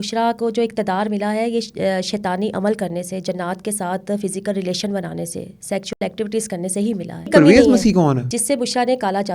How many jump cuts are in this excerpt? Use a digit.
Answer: 2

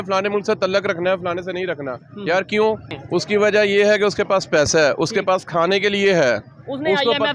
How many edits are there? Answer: 1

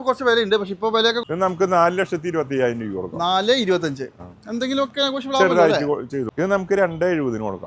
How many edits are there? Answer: 2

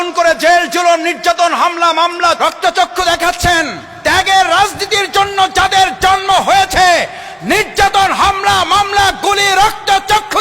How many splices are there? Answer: 2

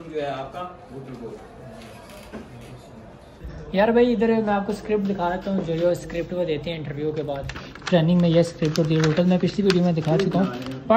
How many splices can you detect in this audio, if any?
0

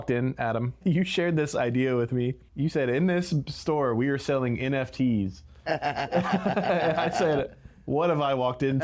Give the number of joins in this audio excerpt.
2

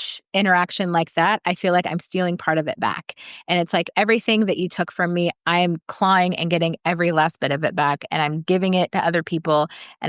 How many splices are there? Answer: 0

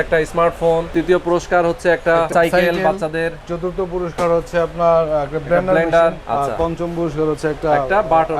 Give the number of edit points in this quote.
3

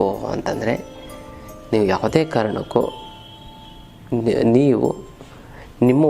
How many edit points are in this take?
0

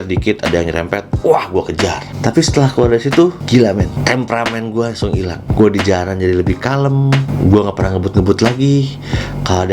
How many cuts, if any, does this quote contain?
2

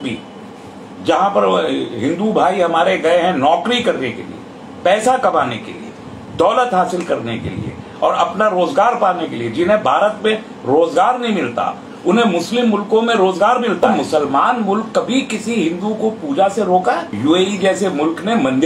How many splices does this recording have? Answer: 2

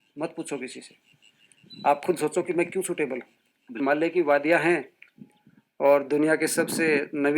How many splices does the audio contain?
1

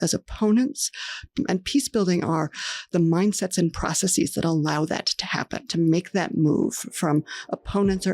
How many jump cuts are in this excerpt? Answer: 0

